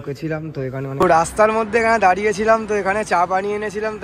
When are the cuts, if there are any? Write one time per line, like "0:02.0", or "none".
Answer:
0:00.9